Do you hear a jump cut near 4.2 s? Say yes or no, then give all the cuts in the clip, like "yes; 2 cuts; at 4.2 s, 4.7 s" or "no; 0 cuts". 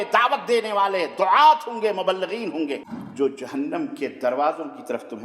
no; 1 cut; at 3.0 s